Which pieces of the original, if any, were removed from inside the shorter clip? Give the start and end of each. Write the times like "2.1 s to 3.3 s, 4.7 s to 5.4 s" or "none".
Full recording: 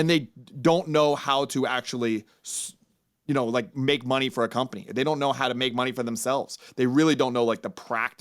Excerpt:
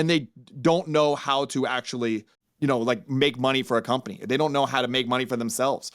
2.4 s to 3.1 s